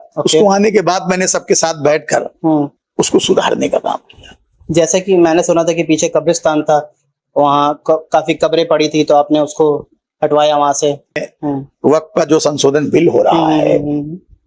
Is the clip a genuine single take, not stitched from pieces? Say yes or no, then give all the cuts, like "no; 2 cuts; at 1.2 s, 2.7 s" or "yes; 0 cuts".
no; 2 cuts; at 2.8 s, 11.2 s